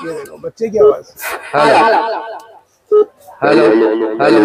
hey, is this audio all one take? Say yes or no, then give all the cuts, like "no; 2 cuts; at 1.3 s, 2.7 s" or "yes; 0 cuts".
yes; 0 cuts